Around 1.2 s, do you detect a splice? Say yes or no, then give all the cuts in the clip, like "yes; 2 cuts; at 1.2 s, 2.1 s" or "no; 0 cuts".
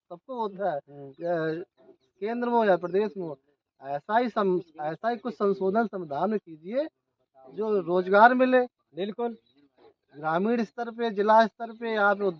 no; 0 cuts